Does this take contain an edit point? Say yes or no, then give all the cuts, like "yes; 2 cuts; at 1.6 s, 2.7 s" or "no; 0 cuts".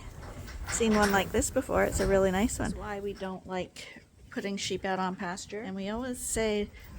yes; 2 cuts; at 2.8 s, 5.6 s